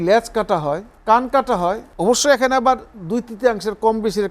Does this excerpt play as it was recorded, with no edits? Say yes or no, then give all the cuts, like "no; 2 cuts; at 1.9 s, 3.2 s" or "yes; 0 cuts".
no; 2 cuts; at 0.9 s, 1.9 s